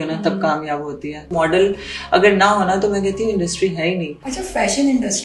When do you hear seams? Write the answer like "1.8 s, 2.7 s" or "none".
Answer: 1.3 s, 4.2 s